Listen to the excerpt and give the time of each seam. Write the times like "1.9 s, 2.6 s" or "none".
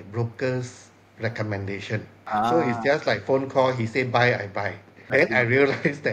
2.1 s, 5.1 s